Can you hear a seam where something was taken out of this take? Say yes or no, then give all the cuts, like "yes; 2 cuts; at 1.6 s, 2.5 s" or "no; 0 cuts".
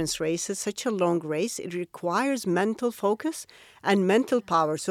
no; 0 cuts